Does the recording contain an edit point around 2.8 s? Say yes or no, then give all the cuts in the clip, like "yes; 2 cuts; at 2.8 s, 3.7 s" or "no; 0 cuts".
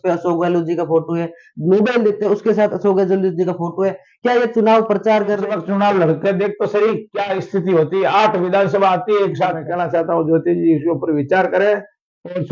no; 2 cuts; at 5.5 s, 9.6 s